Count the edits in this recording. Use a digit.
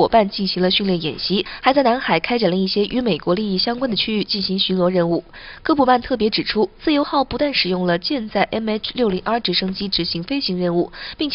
1